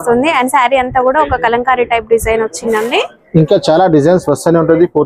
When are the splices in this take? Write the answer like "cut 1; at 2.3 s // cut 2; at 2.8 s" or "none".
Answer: cut 1; at 3.2 s